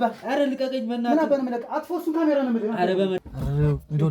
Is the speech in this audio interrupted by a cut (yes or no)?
yes